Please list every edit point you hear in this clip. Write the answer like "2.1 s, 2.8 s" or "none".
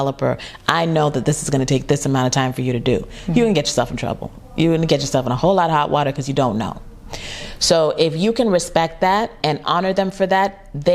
9.4 s